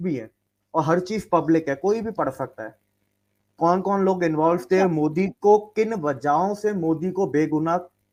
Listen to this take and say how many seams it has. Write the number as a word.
zero